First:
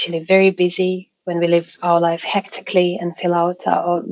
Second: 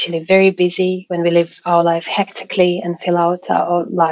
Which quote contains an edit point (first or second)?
second